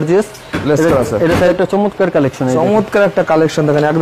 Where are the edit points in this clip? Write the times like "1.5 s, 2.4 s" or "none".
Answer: 1.5 s

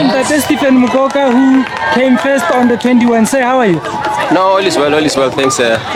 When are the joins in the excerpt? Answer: none

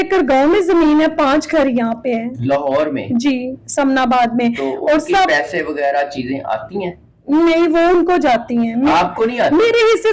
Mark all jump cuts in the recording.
none

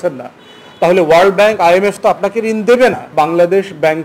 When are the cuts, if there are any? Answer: 3.1 s

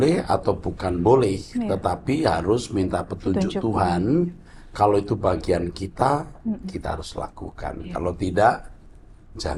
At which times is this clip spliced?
none

